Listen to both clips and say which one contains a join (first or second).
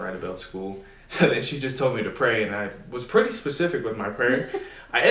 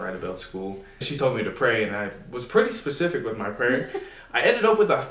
second